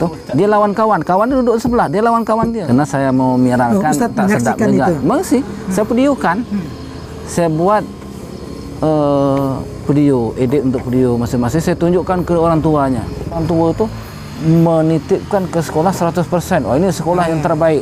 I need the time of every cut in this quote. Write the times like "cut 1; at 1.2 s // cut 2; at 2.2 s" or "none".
cut 1; at 2.6 s // cut 2; at 13.4 s